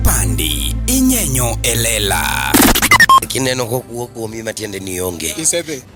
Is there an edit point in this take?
no; 0 cuts

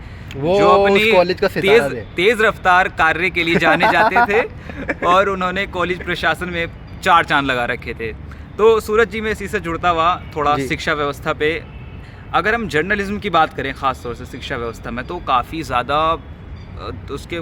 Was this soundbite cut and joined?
no; 0 cuts

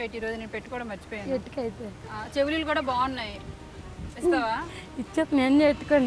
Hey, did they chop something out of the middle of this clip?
yes; 1 cut; at 2.0 s

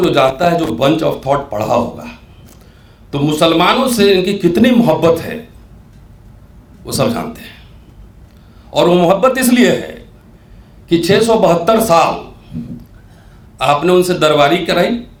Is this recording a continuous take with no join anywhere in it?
yes; 0 cuts

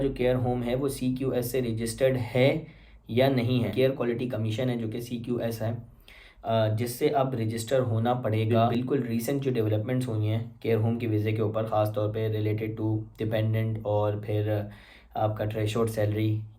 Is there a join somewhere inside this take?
yes; 2 cuts; at 3.7 s, 8.7 s

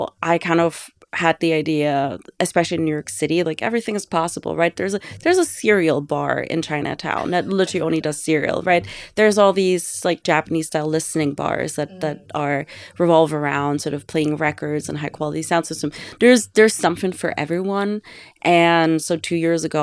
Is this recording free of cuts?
yes; 0 cuts

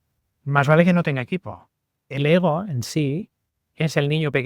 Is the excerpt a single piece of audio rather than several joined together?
no; 1 cut; at 2.1 s

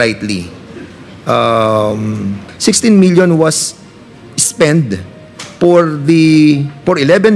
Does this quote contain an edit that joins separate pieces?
yes; 1 cut; at 2.5 s

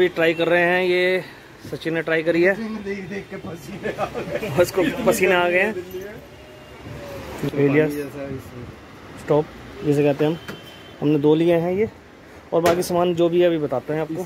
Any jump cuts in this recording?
yes; 1 cut; at 7.5 s

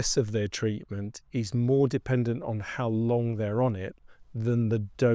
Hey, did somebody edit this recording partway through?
no; 0 cuts

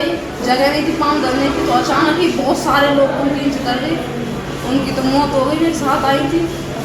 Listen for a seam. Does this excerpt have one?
no; 0 cuts

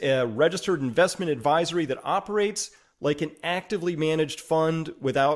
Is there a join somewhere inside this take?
no; 0 cuts

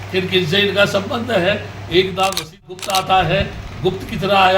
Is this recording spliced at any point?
yes; 1 cut; at 2.7 s

